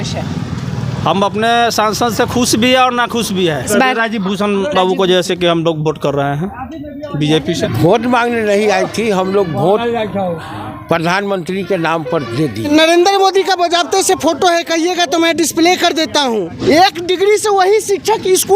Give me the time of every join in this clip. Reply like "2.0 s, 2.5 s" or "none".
3.7 s, 7.7 s, 12.7 s, 16.5 s